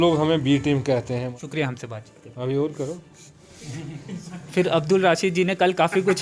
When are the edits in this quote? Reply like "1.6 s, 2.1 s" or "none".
1.3 s